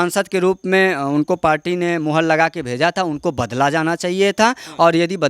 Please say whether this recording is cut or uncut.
uncut